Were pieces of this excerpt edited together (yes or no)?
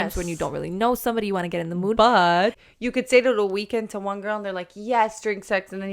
yes